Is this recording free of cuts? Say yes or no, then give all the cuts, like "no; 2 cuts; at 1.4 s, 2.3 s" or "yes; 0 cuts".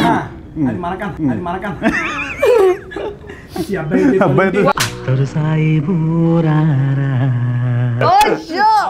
yes; 0 cuts